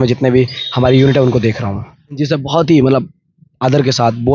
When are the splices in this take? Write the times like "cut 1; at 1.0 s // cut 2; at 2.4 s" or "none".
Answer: cut 1; at 2.2 s